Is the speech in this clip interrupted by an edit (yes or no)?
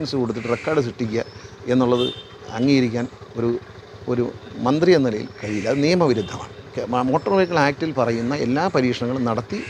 no